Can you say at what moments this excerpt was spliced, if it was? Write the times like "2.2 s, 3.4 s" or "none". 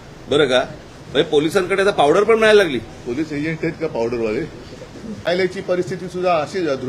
5.2 s